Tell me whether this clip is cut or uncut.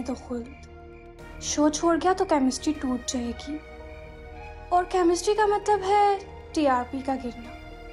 uncut